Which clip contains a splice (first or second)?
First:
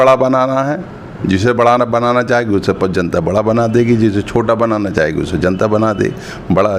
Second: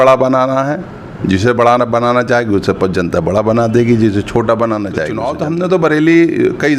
second